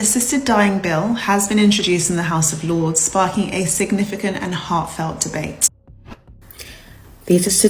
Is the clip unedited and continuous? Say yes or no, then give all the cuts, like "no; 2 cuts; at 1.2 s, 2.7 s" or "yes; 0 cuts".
no; 1 cut; at 6.0 s